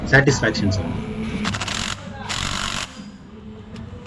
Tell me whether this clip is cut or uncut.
uncut